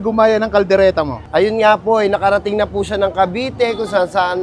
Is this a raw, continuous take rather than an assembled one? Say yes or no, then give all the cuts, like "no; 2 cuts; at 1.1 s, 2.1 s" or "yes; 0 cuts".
yes; 0 cuts